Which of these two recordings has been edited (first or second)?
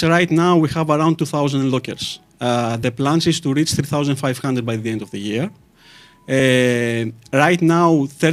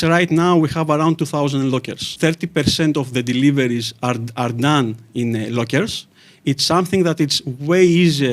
second